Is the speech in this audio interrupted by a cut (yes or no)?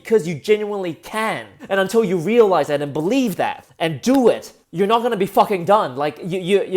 yes